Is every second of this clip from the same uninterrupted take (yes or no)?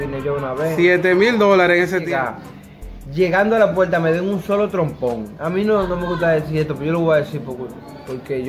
no